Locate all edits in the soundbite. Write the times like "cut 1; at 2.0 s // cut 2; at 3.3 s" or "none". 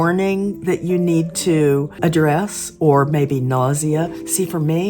cut 1; at 1.9 s